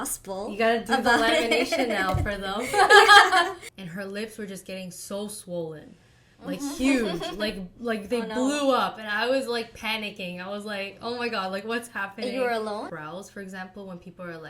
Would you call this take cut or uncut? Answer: cut